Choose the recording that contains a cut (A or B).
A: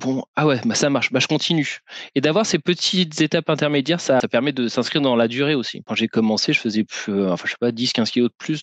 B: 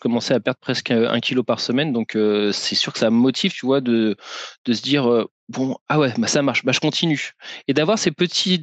A